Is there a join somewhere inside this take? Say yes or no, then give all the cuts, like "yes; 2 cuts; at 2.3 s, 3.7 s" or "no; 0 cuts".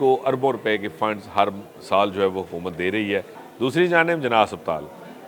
yes; 1 cut; at 3.4 s